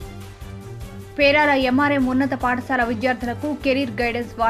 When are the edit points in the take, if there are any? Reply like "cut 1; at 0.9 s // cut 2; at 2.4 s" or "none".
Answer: none